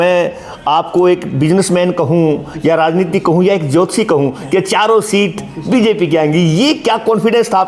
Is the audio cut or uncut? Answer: uncut